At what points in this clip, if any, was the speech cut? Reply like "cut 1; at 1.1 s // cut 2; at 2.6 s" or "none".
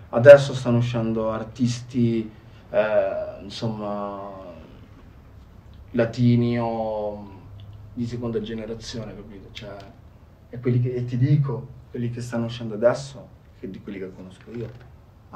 none

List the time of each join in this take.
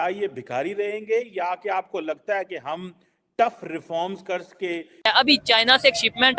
cut 1; at 5.1 s

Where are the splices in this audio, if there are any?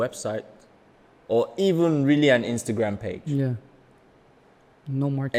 none

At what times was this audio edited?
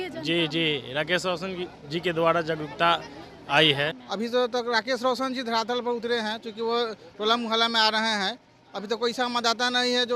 cut 1; at 4.0 s

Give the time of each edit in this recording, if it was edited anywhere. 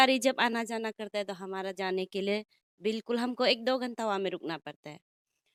none

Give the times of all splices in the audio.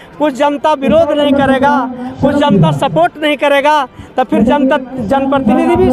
none

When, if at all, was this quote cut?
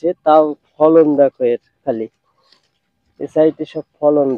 none

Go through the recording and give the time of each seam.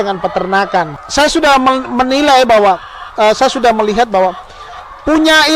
cut 1; at 1.0 s

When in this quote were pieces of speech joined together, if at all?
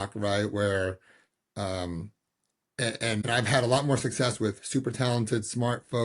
cut 1; at 3.2 s

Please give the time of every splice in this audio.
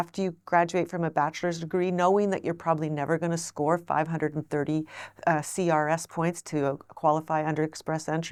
none

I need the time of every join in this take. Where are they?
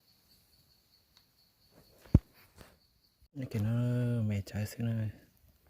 cut 1; at 3.4 s

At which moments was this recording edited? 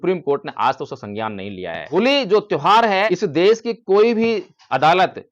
cut 1; at 1.9 s // cut 2; at 3.1 s

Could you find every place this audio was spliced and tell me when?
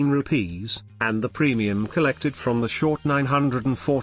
cut 1; at 1.2 s

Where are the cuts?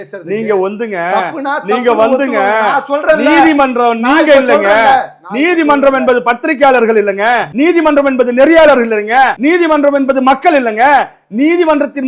cut 1; at 7.5 s // cut 2; at 9.4 s

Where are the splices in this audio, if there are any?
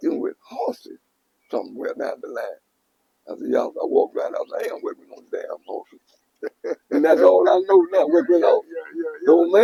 none

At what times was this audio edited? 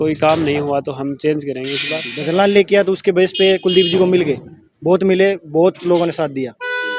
cut 1; at 2.1 s

